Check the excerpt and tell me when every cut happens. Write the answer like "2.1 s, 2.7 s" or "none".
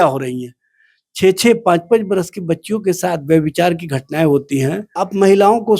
4.9 s